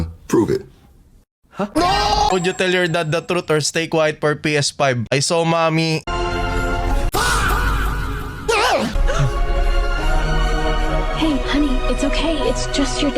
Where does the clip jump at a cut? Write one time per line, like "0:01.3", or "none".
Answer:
0:02.3